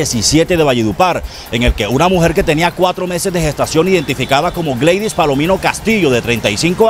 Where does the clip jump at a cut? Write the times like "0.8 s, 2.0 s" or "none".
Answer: none